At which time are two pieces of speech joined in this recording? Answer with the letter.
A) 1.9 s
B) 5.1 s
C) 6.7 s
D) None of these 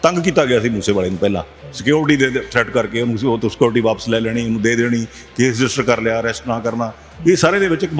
D